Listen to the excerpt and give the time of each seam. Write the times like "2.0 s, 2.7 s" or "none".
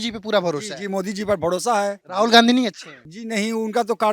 2.0 s